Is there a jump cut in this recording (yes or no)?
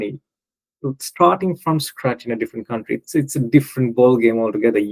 no